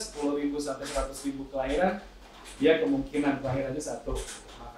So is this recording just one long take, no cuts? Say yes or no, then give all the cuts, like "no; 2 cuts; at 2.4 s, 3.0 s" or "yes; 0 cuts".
yes; 0 cuts